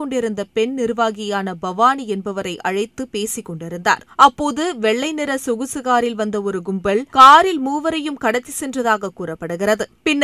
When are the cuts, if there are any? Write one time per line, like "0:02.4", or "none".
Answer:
none